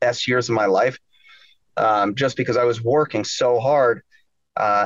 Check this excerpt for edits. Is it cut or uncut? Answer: uncut